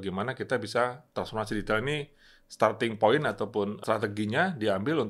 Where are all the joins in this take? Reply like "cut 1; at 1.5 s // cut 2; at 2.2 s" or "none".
cut 1; at 3.8 s